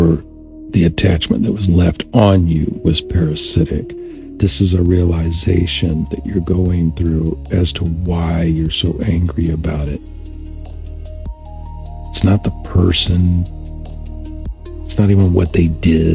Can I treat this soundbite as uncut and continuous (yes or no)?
no